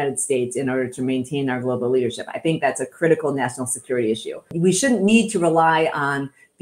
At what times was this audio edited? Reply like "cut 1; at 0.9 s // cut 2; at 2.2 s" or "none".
cut 1; at 4.5 s